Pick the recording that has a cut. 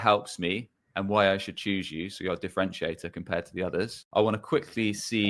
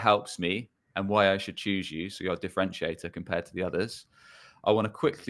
first; 1 cut; at 4.0 s

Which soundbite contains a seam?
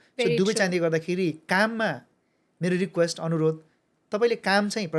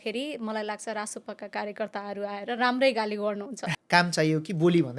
second; 1 cut; at 3.7 s

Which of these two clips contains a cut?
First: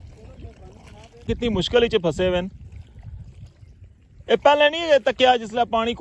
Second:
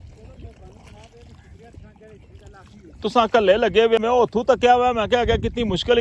first; 1 cut; at 1.3 s

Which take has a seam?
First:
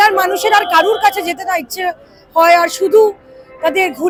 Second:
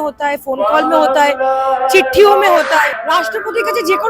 second; 1 cut; at 2.9 s

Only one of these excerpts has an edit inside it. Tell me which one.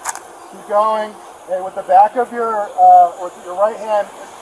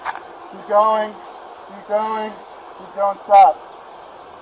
first; 1 cut; at 1.3 s

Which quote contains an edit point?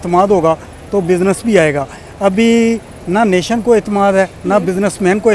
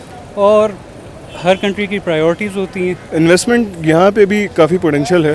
second; 1 cut; at 3.0 s

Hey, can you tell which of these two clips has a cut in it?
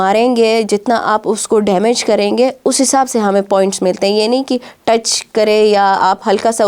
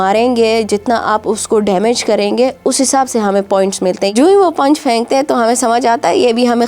second; 1 cut; at 4.1 s

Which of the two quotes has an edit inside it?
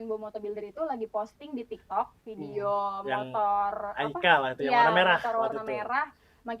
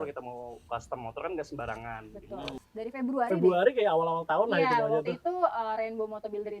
second; 1 cut; at 2.6 s

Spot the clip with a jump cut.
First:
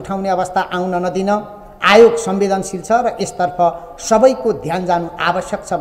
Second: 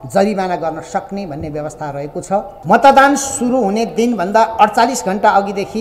second; 1 cut; at 2.5 s

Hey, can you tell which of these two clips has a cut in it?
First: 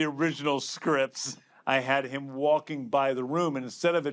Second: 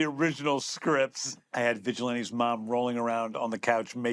second; 1 cut; at 1.4 s

